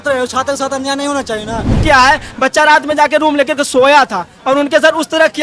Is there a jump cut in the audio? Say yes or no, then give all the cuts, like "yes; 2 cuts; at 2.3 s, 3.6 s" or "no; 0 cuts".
yes; 1 cut; at 1.8 s